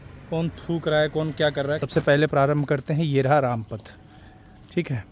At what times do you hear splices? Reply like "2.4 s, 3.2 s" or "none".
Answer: 1.8 s